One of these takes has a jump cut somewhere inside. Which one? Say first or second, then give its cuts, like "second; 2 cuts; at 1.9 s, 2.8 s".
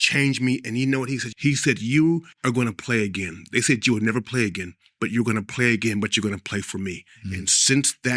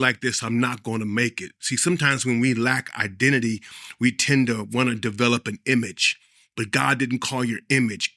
first; 2 cuts; at 1.3 s, 2.3 s